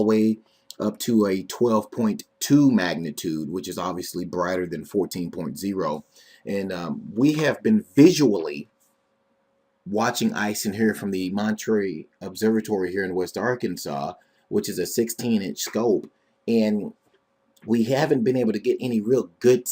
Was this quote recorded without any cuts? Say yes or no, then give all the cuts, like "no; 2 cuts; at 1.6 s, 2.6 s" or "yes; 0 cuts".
no; 1 cut; at 13.1 s